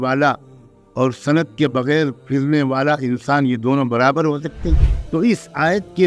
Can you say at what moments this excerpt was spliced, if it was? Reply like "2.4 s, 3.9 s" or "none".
4.9 s